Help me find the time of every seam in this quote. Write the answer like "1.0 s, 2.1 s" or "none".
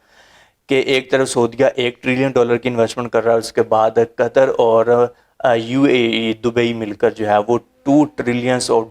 none